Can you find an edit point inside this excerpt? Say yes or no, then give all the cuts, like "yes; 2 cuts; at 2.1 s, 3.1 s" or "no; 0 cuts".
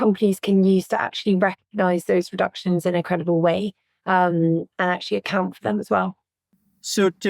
no; 0 cuts